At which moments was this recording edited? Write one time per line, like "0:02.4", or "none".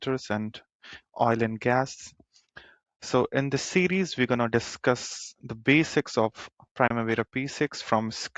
none